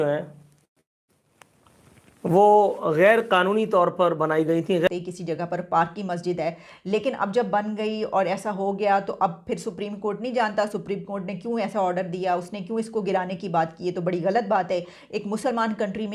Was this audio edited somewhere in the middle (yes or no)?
yes